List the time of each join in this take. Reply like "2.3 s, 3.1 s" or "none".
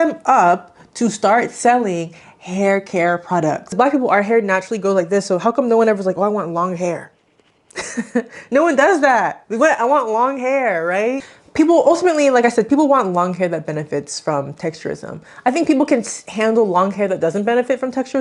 3.7 s, 11.4 s